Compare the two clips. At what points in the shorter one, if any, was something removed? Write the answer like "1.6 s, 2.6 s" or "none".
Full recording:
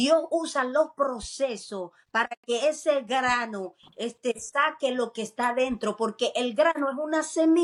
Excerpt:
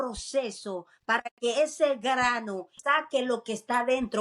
2.8 s